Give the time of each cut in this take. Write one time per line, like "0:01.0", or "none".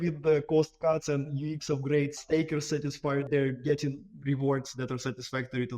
0:02.2
0:03.3

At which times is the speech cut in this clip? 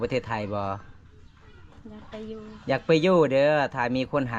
none

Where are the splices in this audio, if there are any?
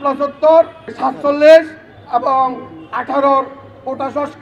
0:00.9

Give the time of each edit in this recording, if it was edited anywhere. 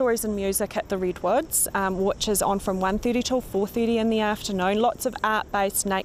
none

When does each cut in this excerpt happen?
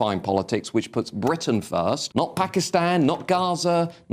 0:02.0

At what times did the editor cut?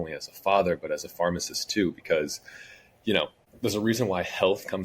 0:03.4

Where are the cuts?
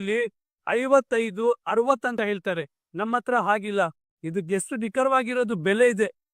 0:02.1

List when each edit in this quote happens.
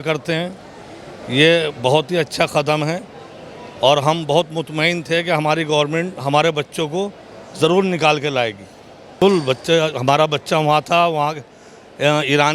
0:09.2

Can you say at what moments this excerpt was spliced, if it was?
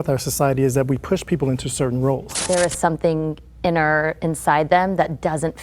0:02.4

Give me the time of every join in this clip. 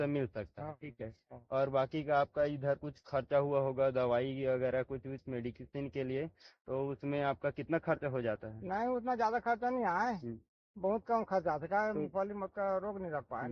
none

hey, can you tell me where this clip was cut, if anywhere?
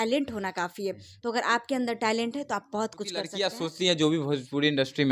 0:03.4

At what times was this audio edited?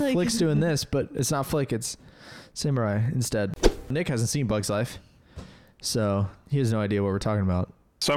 0:03.9

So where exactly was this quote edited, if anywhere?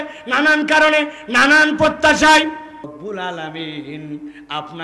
none

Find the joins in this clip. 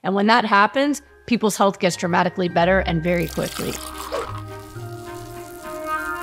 0:03.8

